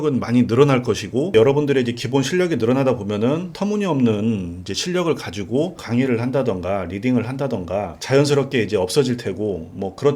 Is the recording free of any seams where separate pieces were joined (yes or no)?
yes